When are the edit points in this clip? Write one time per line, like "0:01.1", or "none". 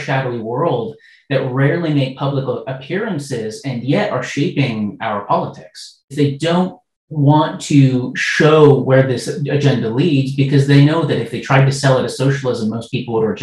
0:06.1